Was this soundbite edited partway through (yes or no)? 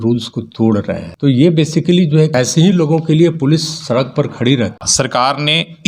yes